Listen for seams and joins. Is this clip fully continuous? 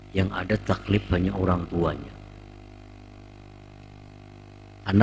yes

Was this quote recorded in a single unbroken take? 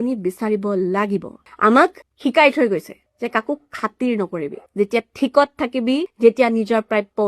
no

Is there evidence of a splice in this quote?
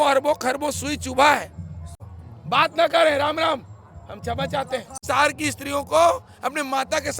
yes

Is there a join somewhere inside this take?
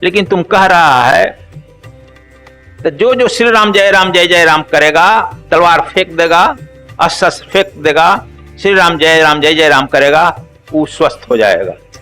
yes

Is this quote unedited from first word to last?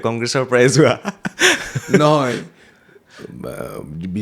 yes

